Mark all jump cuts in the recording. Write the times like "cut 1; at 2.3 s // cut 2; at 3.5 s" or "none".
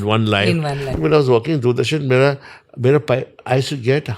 cut 1; at 0.9 s